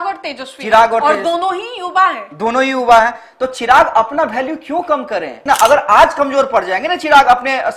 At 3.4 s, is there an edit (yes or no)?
no